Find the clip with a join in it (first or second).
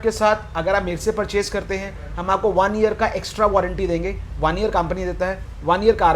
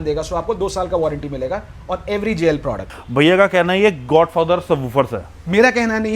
second